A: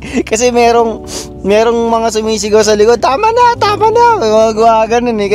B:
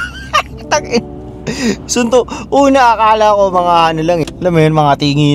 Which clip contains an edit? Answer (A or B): B